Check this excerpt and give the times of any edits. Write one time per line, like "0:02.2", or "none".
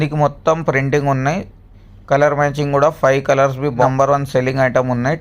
0:03.8